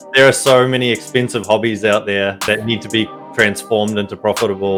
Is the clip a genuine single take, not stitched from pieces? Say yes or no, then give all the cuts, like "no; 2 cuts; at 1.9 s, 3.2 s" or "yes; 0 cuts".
yes; 0 cuts